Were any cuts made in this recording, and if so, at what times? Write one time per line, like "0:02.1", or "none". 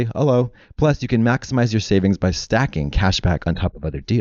none